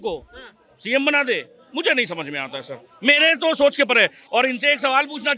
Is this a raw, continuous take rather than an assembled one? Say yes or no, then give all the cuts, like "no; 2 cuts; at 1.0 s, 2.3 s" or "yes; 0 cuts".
yes; 0 cuts